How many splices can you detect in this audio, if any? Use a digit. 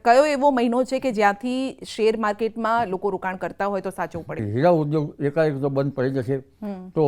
1